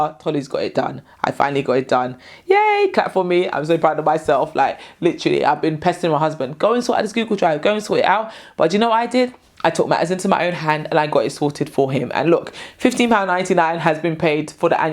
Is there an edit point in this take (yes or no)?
no